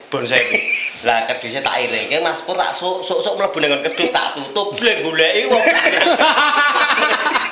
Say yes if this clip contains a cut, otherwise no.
no